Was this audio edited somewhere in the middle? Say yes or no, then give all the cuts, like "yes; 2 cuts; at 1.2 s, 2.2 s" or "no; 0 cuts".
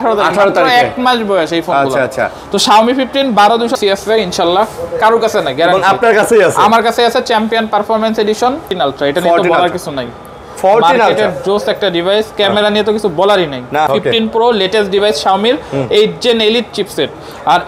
yes; 3 cuts; at 3.8 s, 8.7 s, 13.9 s